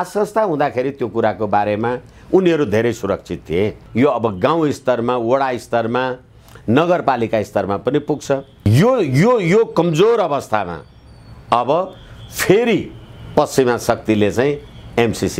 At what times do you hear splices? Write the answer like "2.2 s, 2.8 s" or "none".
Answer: 3.8 s, 8.5 s